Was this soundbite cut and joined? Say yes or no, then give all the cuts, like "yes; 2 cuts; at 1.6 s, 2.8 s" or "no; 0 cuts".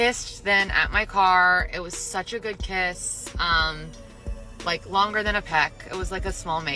no; 0 cuts